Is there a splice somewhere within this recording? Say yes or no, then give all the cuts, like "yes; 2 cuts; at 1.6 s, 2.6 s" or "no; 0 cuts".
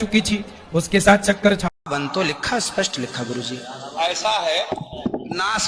yes; 1 cut; at 1.9 s